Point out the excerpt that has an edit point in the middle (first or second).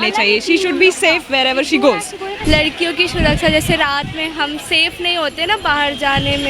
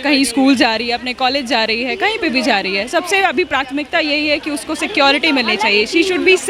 first